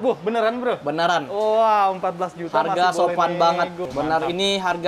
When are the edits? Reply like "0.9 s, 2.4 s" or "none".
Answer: 3.8 s